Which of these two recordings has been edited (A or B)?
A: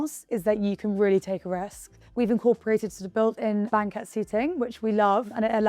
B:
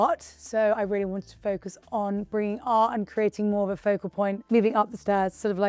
A